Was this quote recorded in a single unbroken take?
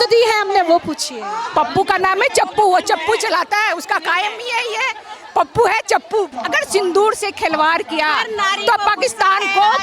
no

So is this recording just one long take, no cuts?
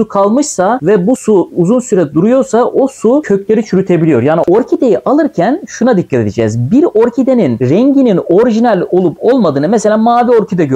no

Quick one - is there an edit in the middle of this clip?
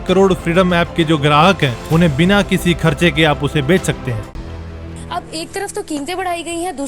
yes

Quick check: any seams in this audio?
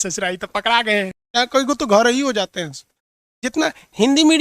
yes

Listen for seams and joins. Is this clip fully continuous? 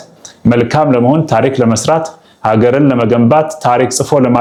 yes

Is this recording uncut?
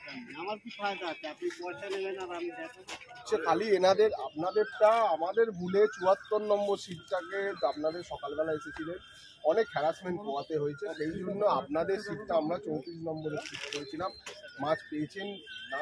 no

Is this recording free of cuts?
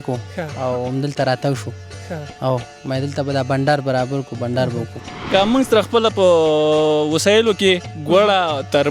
no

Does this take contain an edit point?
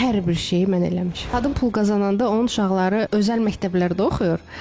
yes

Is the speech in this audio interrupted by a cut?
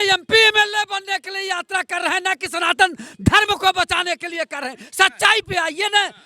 no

